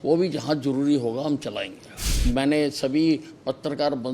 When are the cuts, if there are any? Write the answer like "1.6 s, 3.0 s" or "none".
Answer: 2.1 s